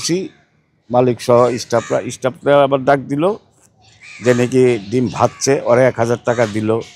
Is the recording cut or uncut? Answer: uncut